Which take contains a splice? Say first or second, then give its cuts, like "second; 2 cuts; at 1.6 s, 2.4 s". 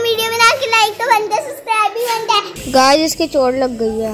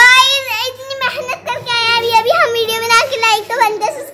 first; 1 cut; at 2.6 s